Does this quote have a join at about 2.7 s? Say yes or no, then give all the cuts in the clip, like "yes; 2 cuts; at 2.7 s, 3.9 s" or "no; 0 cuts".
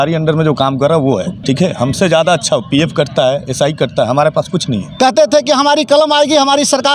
no; 2 cuts; at 1.3 s, 4.8 s